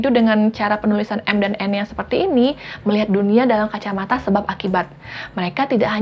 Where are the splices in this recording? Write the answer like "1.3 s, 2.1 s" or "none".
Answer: none